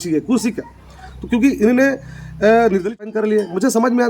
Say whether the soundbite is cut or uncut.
cut